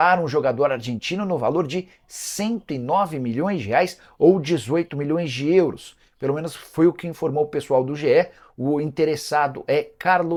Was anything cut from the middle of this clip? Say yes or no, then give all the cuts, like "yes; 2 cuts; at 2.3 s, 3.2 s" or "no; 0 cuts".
no; 0 cuts